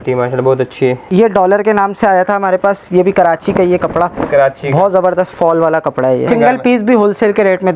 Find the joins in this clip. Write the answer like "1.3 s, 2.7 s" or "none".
1.0 s, 6.3 s